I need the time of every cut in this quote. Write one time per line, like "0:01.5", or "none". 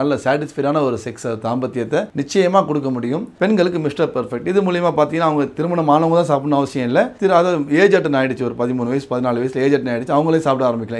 0:02.1
0:03.3